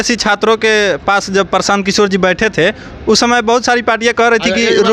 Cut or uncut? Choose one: uncut